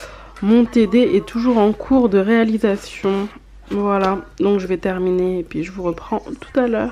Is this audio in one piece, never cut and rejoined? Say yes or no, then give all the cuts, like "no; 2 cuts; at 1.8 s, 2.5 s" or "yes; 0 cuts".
yes; 0 cuts